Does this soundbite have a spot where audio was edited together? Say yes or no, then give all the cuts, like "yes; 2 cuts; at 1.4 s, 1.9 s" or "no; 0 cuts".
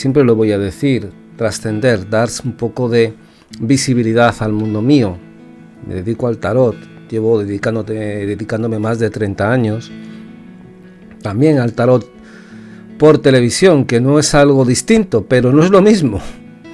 yes; 2 cuts; at 9.8 s, 11.1 s